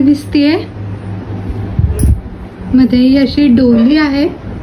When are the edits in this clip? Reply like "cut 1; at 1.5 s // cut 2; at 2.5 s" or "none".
none